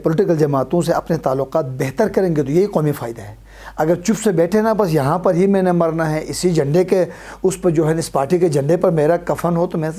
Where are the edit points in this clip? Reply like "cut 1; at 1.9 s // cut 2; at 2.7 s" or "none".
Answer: none